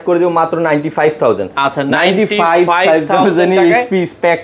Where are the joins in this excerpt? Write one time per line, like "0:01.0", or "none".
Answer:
none